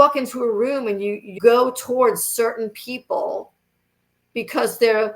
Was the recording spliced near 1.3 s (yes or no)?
yes